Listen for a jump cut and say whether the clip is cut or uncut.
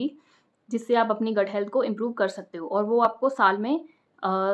uncut